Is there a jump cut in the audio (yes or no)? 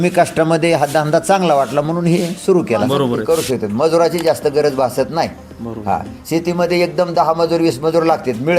yes